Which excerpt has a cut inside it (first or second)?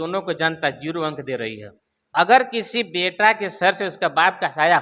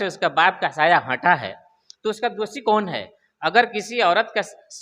first